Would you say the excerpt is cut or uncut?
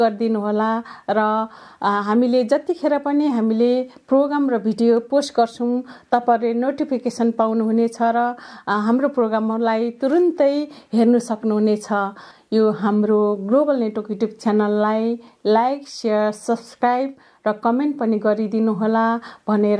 cut